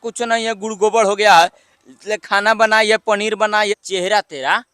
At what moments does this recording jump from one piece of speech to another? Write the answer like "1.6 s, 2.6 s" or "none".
3.8 s